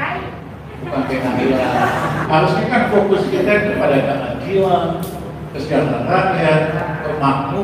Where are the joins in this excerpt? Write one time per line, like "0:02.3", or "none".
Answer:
0:02.2